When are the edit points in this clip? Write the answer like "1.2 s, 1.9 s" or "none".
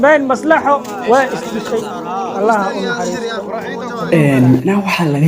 4.1 s